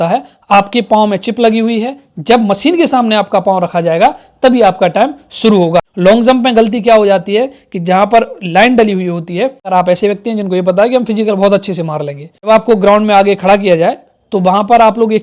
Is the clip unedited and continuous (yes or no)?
no